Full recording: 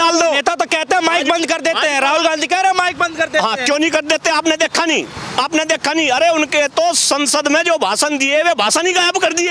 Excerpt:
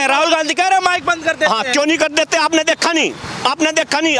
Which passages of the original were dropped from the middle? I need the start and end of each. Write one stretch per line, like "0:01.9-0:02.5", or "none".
none